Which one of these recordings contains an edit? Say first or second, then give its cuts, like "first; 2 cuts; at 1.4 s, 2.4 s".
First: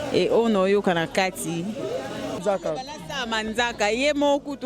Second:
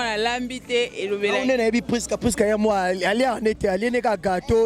first; 1 cut; at 2.4 s